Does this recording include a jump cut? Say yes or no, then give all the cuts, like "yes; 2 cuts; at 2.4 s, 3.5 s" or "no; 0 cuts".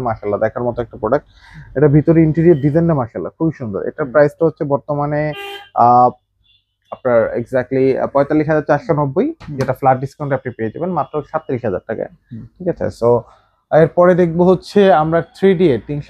no; 0 cuts